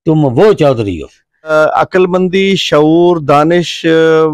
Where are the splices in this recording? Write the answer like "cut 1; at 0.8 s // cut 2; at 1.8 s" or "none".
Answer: cut 1; at 1.5 s